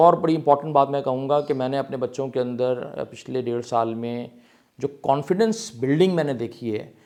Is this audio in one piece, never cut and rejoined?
yes; 0 cuts

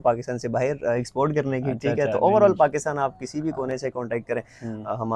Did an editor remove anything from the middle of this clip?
no; 0 cuts

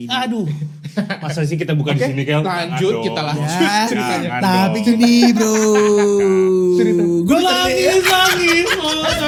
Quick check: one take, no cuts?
yes; 0 cuts

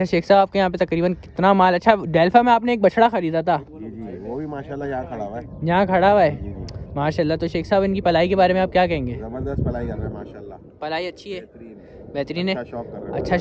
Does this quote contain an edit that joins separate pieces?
no; 0 cuts

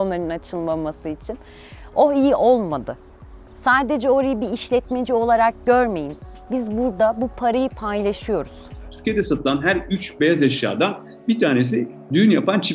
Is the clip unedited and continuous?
no; 1 cut; at 8.8 s

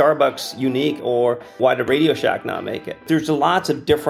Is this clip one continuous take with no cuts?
no; 2 cuts; at 1.4 s, 3.0 s

